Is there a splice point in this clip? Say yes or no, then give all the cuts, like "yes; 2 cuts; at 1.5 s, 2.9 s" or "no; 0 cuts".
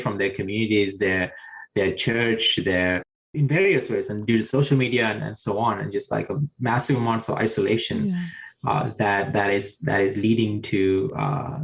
no; 0 cuts